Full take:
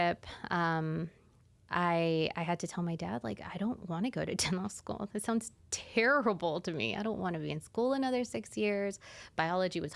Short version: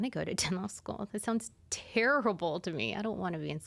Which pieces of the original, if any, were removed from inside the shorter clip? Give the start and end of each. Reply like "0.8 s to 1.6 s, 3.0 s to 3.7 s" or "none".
none

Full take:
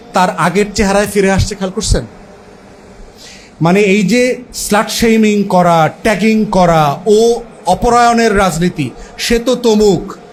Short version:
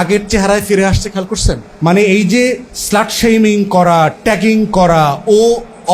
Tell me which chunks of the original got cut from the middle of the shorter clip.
2.1 s to 3.5 s

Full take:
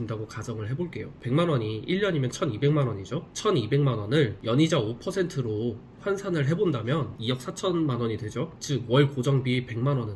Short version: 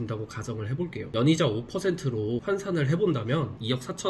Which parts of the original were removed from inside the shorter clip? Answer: 1.1 s to 4.4 s, 5.7 s to 6.0 s

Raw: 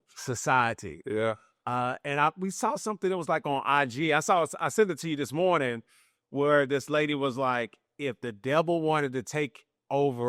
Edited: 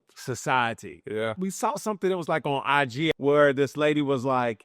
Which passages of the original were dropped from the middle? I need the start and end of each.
1.4 s to 2.4 s, 4.1 s to 6.2 s

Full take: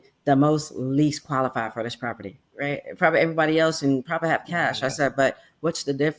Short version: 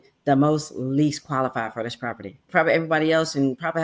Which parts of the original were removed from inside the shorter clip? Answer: 2.4 s to 2.9 s

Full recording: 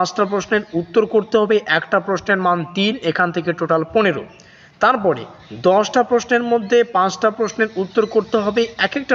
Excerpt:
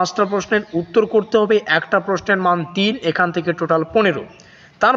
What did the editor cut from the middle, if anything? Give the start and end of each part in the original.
none

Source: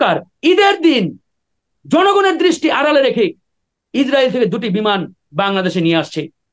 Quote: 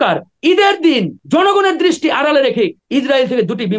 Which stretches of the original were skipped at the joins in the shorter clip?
1.2 s to 1.8 s, 3.4 s to 3.8 s

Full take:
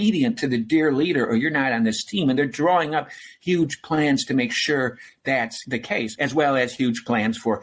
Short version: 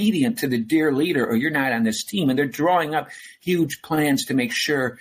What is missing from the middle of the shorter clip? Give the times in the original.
none

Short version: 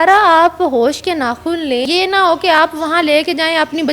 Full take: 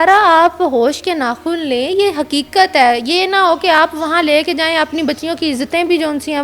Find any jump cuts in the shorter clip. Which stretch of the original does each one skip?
1.8 s to 3.0 s

